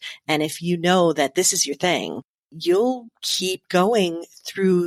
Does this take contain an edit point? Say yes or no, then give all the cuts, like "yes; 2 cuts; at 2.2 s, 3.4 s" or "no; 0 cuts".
no; 0 cuts